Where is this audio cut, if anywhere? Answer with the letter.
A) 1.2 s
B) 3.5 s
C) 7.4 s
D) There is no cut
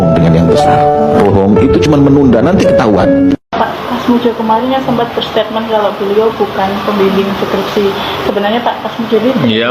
A